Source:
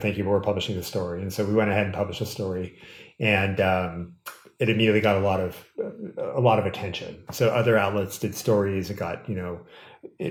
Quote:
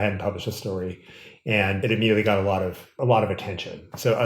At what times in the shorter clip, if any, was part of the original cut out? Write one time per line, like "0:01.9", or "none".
0:01.8
0:02.9